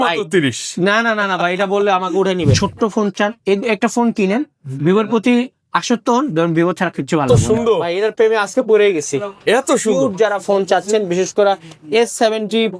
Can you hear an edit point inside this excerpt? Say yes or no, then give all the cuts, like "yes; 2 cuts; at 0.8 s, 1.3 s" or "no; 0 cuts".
yes; 2 cuts; at 2.6 s, 7.2 s